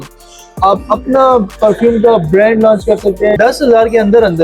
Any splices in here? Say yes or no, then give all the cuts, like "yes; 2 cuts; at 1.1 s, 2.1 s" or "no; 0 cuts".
yes; 1 cut; at 3.4 s